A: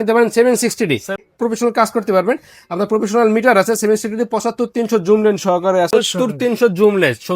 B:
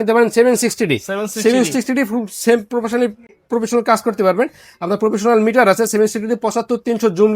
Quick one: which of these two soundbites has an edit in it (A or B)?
A